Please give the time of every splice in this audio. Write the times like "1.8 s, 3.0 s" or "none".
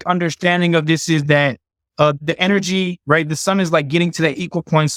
none